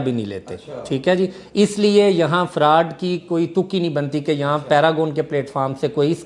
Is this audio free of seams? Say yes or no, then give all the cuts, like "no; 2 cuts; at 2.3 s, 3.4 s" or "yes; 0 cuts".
yes; 0 cuts